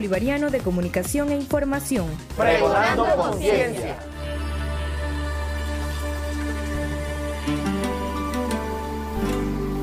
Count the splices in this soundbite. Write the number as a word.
zero